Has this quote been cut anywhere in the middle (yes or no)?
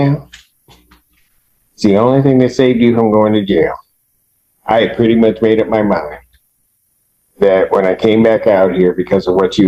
no